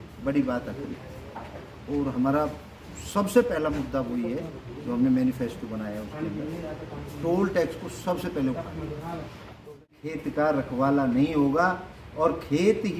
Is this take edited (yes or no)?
yes